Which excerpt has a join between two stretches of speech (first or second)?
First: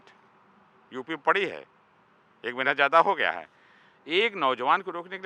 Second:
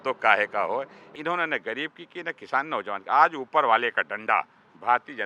second